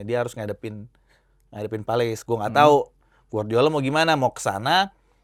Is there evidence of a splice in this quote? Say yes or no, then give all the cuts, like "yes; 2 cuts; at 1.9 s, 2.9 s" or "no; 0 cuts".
no; 0 cuts